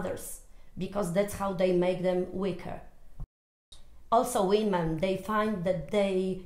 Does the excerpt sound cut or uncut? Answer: cut